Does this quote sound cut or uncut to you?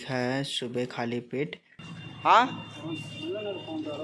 cut